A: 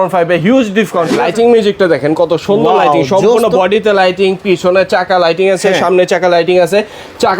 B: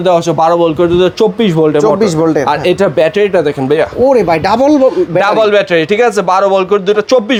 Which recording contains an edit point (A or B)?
A